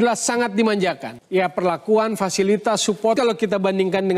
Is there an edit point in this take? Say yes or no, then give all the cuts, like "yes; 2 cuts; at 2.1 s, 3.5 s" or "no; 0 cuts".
yes; 2 cuts; at 1.1 s, 3.2 s